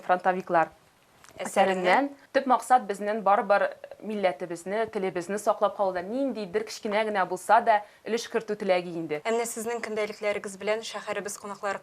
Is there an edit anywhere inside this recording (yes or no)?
yes